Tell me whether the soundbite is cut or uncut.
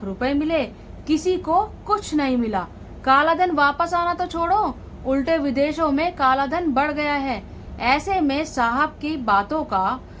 uncut